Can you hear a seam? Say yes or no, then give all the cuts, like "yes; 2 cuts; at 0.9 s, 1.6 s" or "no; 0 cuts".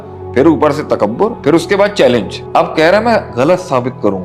yes; 1 cut; at 2.4 s